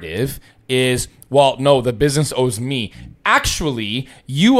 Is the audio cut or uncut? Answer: uncut